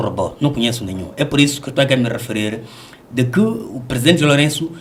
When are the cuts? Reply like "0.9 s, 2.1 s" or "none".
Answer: none